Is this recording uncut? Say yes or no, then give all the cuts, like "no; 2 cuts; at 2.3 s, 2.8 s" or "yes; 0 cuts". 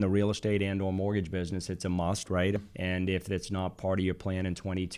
no; 1 cut; at 2.6 s